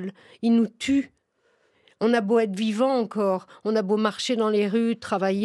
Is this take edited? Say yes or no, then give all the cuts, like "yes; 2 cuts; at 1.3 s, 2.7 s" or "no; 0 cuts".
no; 0 cuts